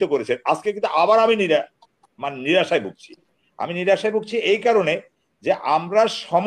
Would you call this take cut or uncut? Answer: uncut